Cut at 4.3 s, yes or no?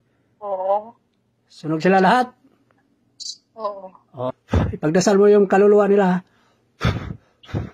yes